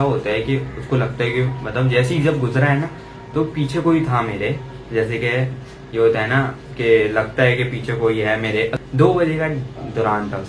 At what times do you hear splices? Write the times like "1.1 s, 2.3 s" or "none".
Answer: 8.8 s